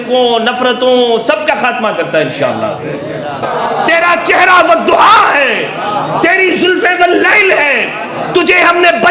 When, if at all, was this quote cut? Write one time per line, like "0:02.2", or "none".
0:03.4